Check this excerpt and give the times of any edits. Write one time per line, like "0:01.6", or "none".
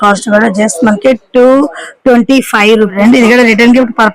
0:02.9